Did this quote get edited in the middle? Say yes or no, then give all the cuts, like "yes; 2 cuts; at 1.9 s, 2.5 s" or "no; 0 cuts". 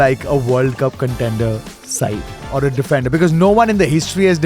no; 0 cuts